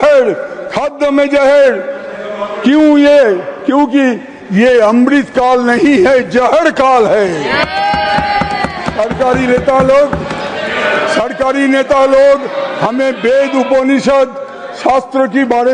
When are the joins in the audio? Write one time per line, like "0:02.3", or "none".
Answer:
none